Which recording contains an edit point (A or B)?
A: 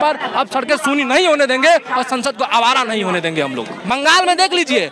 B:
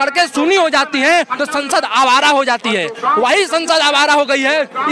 A